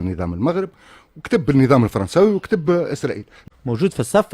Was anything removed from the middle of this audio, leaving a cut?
yes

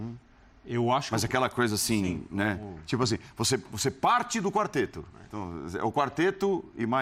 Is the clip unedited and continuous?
yes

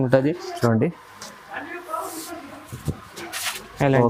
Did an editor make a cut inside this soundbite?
no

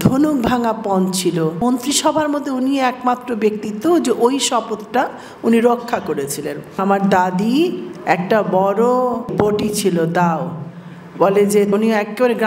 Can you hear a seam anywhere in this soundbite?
yes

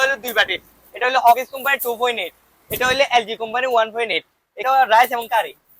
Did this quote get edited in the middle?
yes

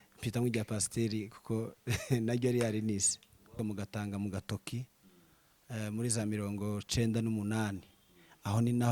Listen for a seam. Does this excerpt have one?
yes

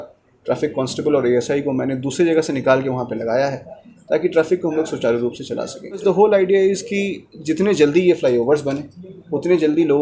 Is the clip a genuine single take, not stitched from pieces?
no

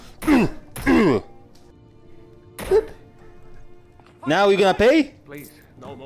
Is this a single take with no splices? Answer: yes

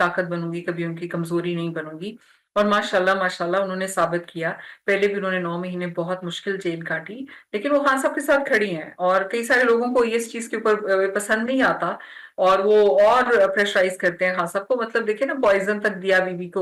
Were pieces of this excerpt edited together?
no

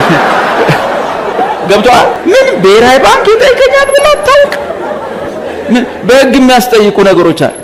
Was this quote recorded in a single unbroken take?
no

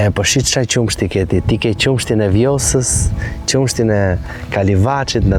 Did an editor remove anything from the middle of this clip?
no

